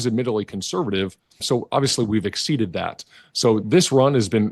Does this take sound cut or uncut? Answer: cut